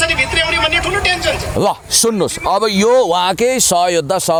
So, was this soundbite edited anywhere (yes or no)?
no